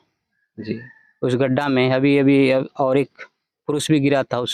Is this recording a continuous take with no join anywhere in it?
yes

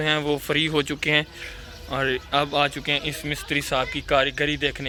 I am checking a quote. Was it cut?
no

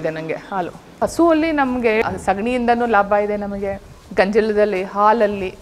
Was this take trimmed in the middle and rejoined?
yes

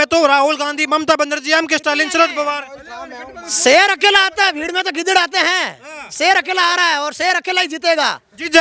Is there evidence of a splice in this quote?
no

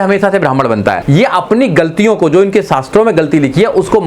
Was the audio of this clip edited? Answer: yes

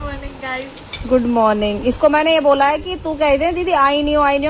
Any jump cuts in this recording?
no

